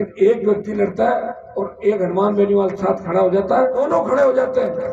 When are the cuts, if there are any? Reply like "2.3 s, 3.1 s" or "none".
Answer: 3.8 s

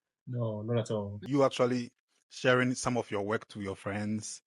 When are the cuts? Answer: 1.2 s

